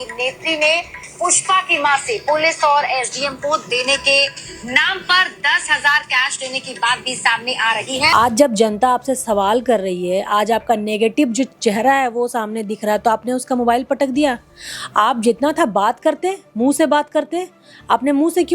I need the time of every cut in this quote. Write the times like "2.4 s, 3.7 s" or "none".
8.1 s